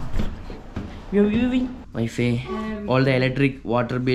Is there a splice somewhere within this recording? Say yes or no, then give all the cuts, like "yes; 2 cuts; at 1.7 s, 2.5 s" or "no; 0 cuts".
yes; 1 cut; at 1.8 s